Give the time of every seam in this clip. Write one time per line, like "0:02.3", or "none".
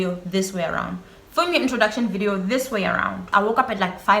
0:03.3